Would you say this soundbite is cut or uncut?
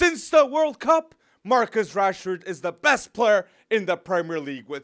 uncut